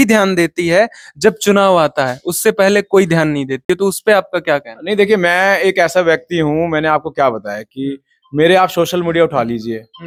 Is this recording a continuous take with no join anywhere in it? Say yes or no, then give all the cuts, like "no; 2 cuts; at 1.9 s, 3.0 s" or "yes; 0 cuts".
yes; 0 cuts